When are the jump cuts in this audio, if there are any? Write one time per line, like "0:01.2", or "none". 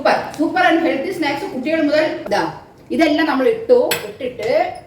0:02.2